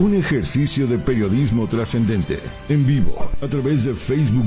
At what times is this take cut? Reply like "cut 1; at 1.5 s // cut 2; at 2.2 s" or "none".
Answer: cut 1; at 2.5 s